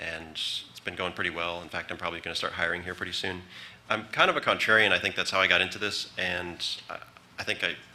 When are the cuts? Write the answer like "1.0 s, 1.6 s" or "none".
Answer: 5.4 s